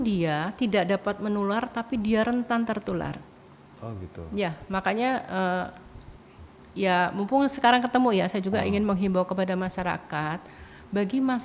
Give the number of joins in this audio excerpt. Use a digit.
0